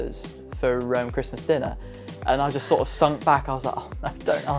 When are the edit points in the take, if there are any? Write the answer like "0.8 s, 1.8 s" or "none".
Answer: none